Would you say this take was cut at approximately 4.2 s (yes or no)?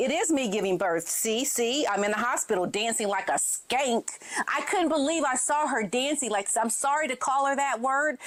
no